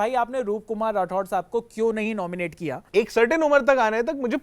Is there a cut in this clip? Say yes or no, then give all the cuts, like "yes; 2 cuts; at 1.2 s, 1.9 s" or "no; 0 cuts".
yes; 1 cut; at 2.8 s